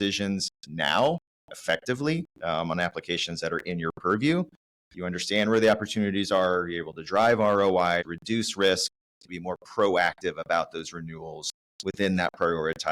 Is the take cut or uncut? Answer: cut